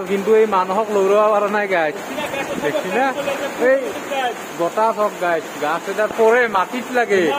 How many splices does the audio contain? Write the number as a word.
zero